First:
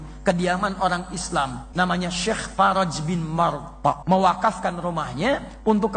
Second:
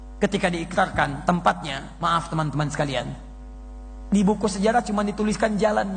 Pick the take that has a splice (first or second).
first